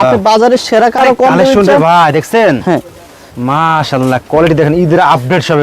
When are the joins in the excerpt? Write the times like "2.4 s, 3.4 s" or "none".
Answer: 1.0 s

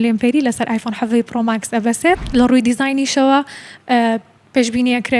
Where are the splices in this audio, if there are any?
2.2 s

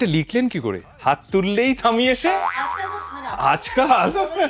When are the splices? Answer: none

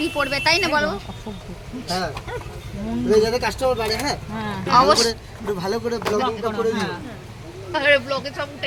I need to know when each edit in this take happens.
none

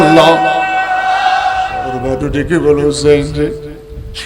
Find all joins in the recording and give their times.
1.8 s

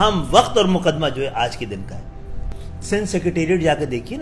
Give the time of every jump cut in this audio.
2.4 s

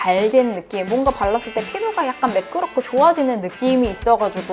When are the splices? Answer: none

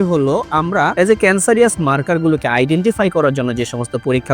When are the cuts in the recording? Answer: 0.9 s

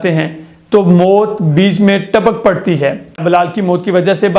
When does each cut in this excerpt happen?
3.2 s

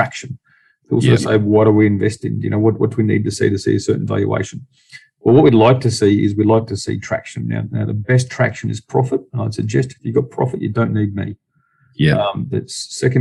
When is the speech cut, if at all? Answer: none

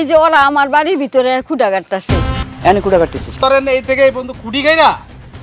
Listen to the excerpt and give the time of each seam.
2.4 s, 3.4 s

